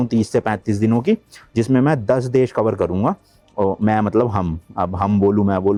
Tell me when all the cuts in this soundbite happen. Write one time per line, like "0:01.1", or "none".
none